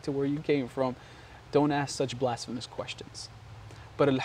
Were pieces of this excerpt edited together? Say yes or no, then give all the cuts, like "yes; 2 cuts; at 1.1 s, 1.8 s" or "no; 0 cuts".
no; 0 cuts